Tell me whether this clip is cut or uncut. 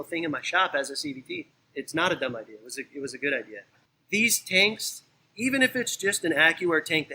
cut